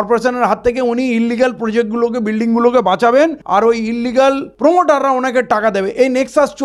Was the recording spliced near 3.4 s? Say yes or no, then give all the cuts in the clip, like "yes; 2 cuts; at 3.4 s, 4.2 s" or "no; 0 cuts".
yes; 2 cuts; at 3.4 s, 4.5 s